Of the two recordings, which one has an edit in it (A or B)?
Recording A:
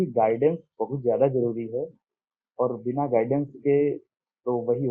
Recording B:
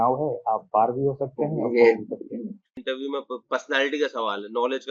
B